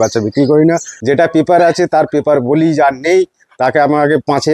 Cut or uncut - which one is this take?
cut